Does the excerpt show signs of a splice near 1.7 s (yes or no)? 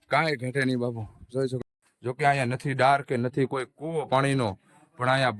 yes